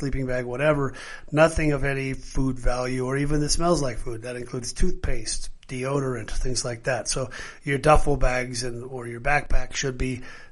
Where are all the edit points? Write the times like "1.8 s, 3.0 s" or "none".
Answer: none